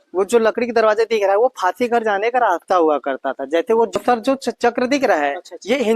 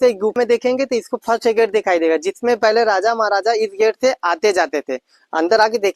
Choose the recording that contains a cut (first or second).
first